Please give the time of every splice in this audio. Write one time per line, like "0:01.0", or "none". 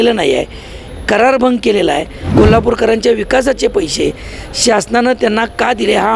0:02.2